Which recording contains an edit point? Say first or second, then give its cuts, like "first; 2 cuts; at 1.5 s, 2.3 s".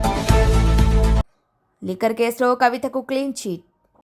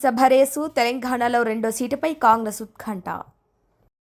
first; 1 cut; at 1.1 s